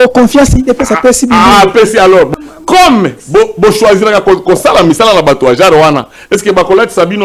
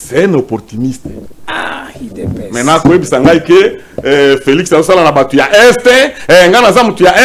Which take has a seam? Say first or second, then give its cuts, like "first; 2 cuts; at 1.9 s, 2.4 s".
first; 1 cut; at 2.3 s